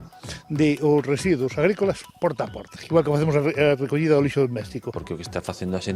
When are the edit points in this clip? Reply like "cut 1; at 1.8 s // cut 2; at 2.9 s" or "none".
cut 1; at 4.9 s

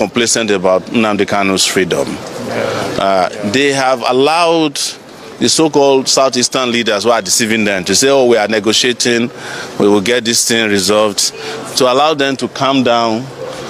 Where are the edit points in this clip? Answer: none

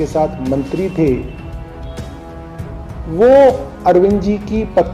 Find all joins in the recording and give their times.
cut 1; at 1.3 s // cut 2; at 2.6 s

